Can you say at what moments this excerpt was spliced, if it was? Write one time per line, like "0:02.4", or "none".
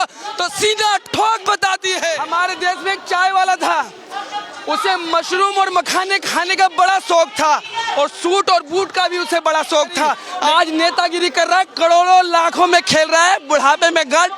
0:02.2
0:10.3